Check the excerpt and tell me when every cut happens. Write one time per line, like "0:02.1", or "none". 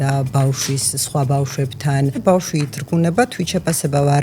0:02.2